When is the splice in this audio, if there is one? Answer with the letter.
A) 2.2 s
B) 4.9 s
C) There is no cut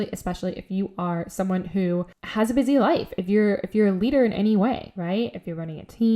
A